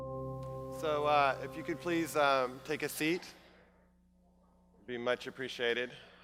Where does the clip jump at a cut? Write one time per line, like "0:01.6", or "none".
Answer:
none